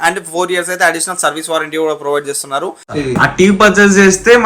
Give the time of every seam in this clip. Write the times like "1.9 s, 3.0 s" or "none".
2.9 s